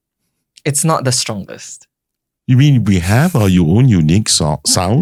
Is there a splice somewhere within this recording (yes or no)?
no